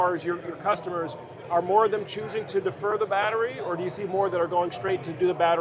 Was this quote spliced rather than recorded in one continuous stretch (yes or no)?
no